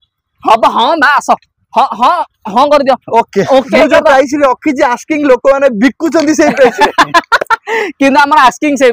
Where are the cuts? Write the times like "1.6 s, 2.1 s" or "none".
3.7 s